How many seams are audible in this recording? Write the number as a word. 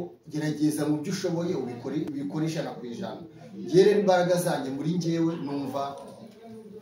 one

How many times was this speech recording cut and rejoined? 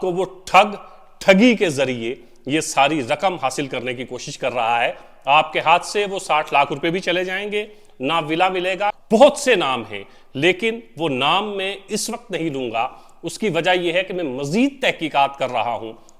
one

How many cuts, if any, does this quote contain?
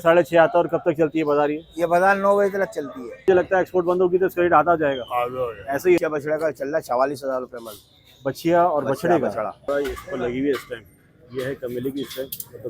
three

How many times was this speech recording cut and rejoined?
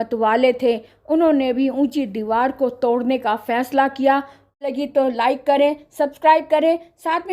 one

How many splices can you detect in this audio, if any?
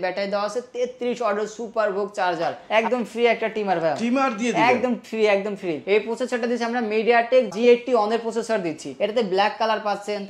three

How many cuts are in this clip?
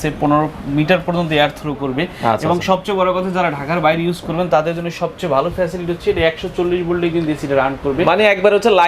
zero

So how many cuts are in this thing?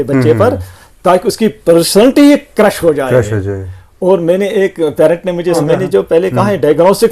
one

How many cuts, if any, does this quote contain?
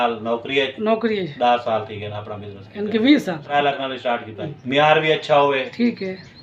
two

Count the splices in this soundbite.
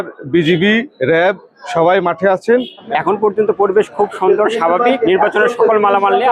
two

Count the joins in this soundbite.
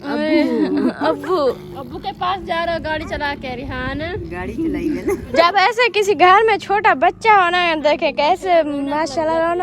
one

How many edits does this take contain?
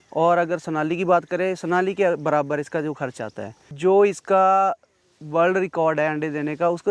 one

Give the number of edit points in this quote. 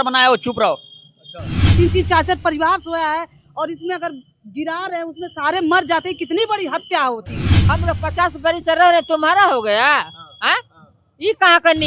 two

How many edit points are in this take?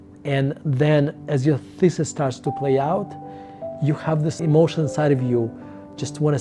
zero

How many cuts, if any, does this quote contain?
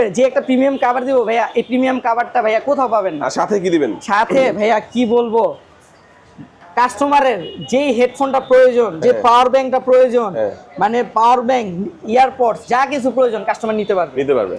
zero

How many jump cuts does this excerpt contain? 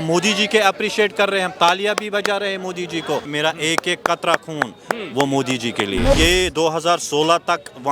two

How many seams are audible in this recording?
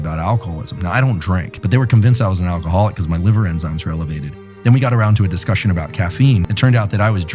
two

